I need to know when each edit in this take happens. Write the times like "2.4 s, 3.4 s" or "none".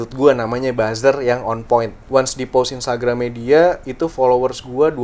2.0 s